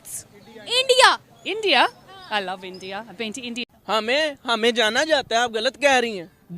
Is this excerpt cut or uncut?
cut